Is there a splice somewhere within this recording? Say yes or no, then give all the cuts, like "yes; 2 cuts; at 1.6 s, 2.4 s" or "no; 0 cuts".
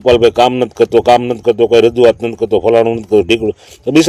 no; 0 cuts